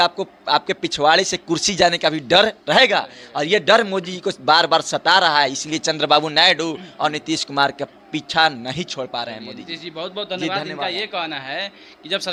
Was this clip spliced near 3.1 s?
no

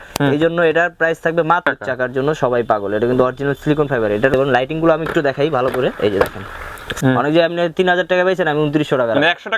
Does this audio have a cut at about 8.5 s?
no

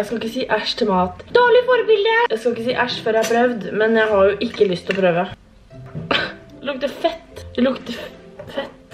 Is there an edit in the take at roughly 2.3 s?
no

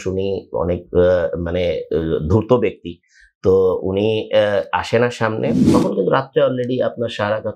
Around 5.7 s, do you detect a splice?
yes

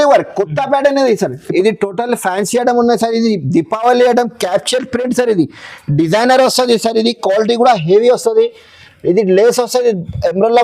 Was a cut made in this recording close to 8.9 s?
no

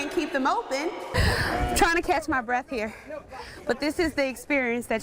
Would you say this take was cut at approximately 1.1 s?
yes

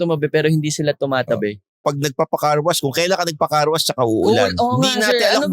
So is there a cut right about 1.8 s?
yes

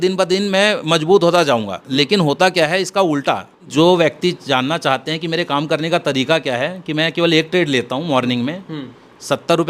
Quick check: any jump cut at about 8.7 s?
no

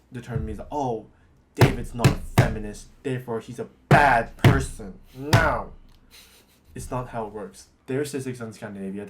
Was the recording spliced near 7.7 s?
yes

